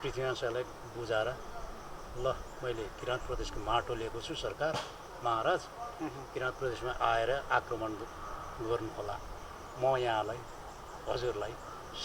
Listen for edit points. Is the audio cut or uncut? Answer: uncut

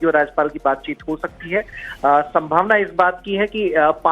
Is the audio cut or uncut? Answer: uncut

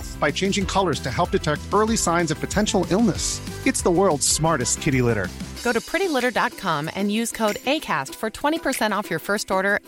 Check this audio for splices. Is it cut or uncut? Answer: uncut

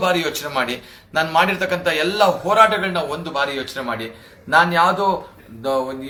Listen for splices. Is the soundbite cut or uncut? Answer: uncut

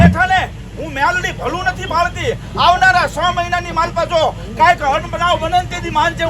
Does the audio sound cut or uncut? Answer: uncut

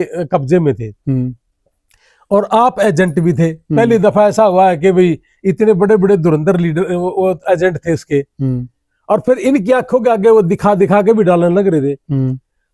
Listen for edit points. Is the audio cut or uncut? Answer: uncut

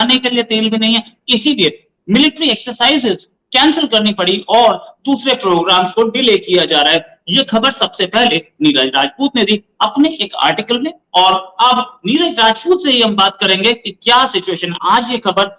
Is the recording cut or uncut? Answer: uncut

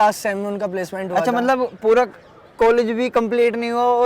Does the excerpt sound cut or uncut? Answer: uncut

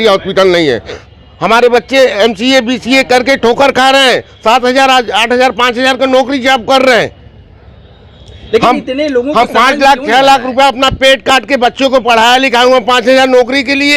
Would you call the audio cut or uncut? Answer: cut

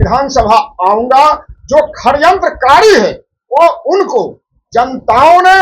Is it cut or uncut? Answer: uncut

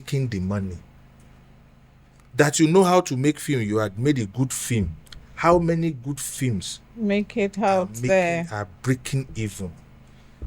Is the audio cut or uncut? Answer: uncut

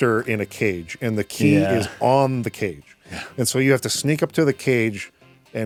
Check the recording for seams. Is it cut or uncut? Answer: uncut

